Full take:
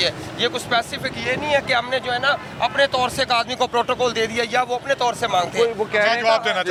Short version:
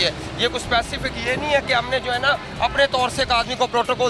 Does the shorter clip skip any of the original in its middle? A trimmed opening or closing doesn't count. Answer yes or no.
no